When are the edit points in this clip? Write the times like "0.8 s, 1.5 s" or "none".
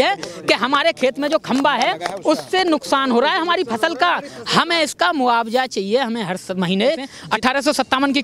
7.2 s